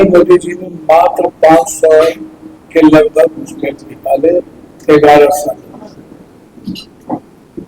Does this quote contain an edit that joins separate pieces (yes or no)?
no